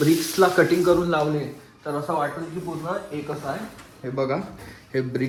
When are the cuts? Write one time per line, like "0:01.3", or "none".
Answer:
none